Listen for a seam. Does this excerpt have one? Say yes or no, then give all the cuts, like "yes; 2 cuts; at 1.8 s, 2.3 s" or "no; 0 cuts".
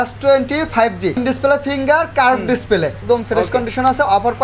yes; 2 cuts; at 1.2 s, 3.0 s